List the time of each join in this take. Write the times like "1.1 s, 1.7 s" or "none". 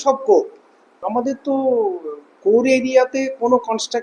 1.0 s